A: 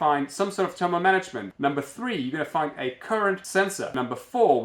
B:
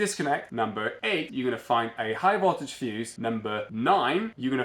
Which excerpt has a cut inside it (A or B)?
A